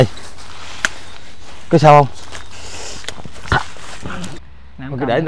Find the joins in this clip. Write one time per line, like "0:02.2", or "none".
0:04.4